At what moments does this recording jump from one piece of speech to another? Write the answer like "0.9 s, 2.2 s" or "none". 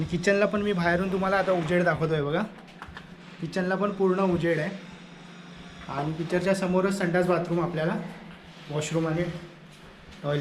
none